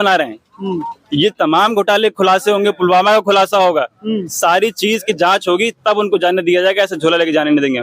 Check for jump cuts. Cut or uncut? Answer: uncut